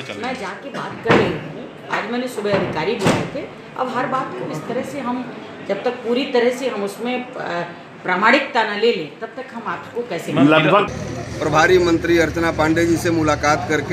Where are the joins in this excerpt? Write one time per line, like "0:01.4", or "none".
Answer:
0:10.9